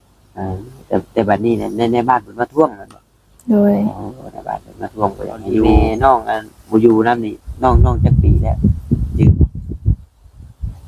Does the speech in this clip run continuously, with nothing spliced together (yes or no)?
no